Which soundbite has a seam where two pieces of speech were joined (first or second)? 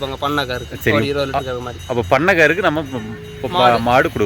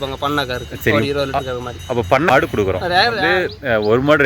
second